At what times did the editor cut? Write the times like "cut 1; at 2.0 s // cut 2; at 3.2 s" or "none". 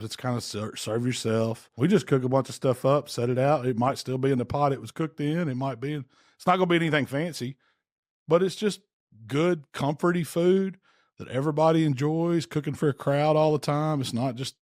cut 1; at 1.6 s